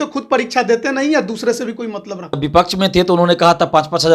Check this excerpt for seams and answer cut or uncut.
cut